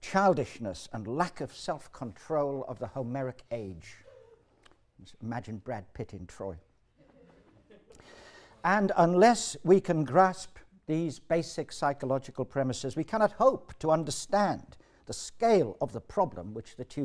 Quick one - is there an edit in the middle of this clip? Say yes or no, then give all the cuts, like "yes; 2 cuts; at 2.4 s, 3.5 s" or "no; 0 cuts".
no; 0 cuts